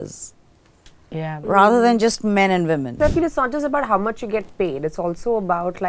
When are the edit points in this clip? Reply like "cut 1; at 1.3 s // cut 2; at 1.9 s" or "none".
cut 1; at 2.9 s